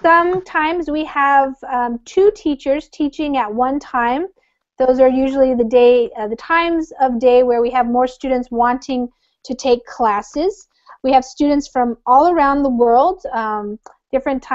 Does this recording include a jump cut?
no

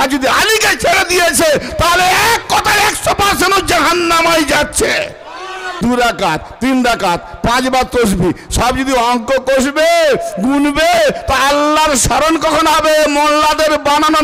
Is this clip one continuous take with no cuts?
no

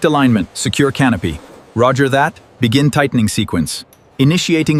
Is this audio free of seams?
yes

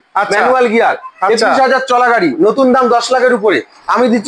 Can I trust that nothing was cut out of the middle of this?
yes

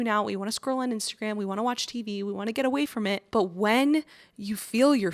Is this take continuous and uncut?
no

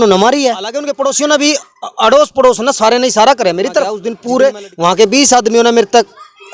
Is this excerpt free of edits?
no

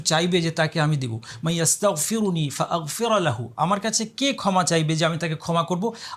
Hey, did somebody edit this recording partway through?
no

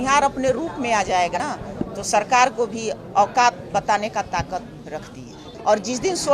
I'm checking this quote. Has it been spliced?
yes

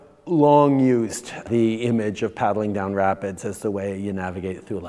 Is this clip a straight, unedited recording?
no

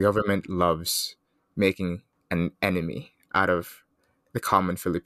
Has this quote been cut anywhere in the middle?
yes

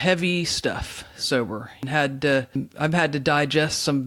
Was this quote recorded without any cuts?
no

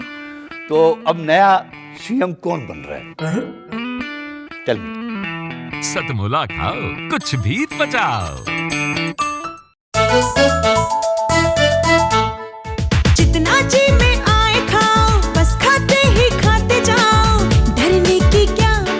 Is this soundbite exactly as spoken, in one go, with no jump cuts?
no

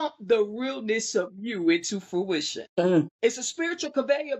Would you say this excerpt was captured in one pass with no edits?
no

